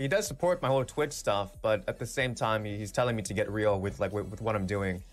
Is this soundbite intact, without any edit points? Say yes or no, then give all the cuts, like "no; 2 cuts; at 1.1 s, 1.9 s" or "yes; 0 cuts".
yes; 0 cuts